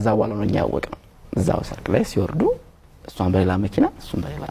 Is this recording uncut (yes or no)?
yes